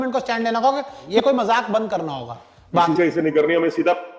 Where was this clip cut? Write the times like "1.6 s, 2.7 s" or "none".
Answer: 1.0 s, 2.9 s